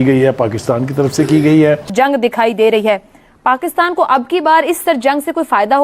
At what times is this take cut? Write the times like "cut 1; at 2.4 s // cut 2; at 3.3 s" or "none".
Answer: cut 1; at 1.9 s